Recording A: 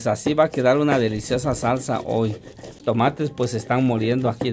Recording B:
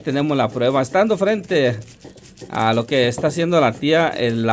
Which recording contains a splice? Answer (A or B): A